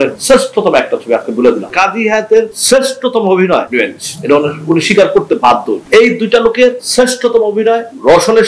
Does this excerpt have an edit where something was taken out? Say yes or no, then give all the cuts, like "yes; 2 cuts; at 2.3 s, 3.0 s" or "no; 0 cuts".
yes; 2 cuts; at 1.7 s, 5.8 s